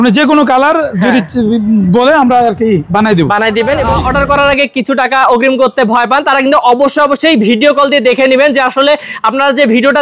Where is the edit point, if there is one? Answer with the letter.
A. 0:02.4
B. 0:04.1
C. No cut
B